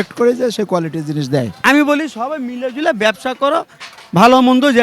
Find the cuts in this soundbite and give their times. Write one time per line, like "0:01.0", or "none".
0:01.6